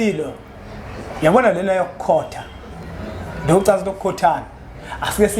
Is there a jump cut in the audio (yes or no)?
no